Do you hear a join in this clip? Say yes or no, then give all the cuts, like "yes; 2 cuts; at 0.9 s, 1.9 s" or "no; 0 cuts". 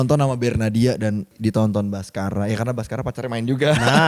yes; 1 cut; at 1.3 s